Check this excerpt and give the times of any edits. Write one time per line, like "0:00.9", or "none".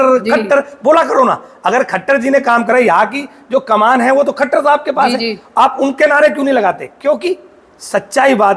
none